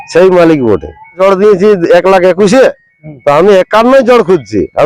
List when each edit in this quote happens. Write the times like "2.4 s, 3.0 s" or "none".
1.2 s

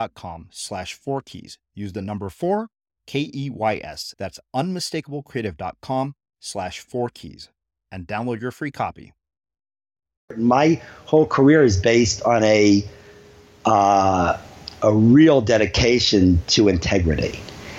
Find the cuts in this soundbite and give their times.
10.4 s

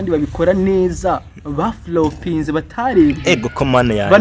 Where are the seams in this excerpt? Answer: none

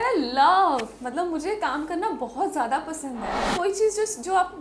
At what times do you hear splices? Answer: 3.5 s

